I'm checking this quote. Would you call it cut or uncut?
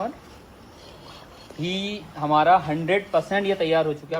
uncut